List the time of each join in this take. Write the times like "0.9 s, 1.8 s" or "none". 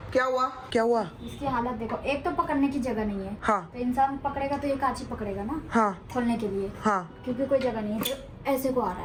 none